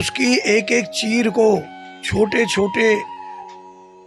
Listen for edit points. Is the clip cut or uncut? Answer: uncut